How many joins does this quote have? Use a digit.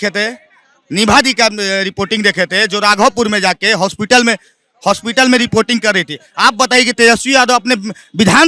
0